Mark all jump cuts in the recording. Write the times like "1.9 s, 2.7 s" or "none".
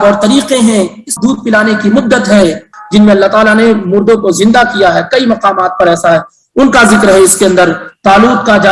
1.1 s, 2.7 s

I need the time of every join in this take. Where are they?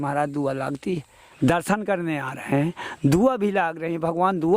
1.1 s

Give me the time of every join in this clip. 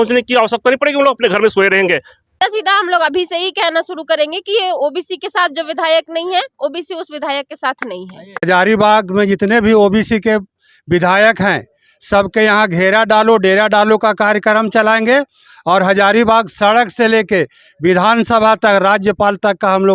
2.2 s, 8.3 s

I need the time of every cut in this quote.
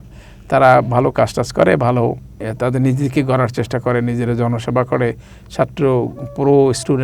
2.4 s

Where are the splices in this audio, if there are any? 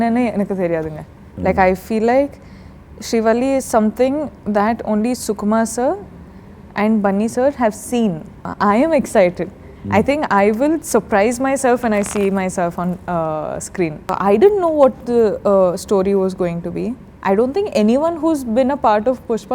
8.5 s, 14.1 s

